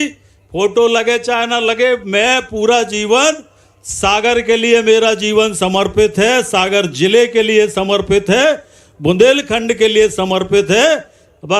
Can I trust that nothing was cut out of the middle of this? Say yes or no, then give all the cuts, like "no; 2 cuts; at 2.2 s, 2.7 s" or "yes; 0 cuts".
yes; 0 cuts